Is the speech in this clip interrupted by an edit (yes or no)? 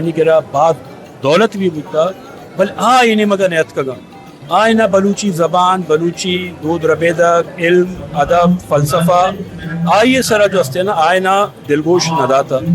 no